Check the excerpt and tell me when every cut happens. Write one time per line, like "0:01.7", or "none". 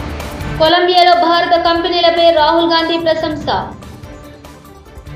none